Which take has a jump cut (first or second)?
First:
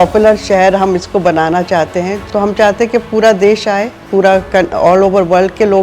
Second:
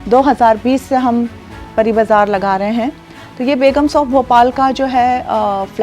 first